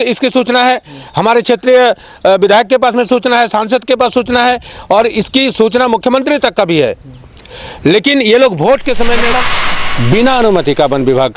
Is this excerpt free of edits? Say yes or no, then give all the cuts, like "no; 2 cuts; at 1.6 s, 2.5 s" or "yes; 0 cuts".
no; 1 cut; at 9.5 s